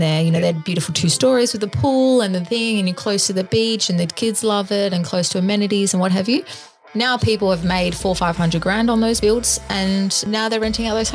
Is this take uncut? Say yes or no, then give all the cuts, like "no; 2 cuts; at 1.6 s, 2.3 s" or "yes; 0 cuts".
no; 2 cuts; at 9.2 s, 10.2 s